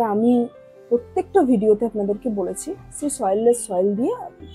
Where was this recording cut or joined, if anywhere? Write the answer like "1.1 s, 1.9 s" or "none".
none